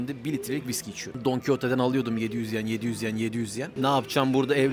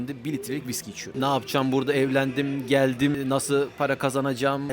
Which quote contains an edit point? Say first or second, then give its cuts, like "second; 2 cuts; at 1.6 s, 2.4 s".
second; 2 cuts; at 1.1 s, 3.2 s